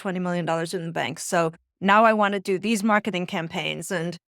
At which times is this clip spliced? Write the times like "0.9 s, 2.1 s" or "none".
none